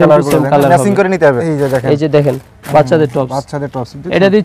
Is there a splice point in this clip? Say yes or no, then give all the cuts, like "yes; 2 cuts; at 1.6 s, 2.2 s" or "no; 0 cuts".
yes; 1 cut; at 1.4 s